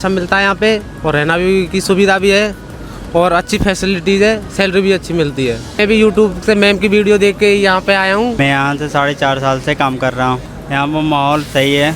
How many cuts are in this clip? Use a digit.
3